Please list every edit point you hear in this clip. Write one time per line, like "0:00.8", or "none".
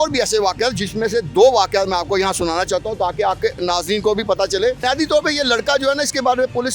0:04.8